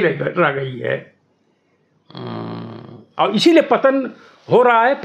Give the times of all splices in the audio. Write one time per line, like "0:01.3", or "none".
none